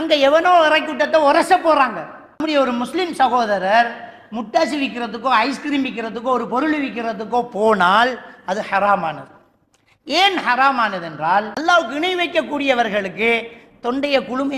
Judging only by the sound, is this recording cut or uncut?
cut